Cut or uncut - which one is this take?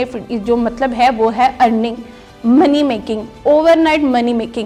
uncut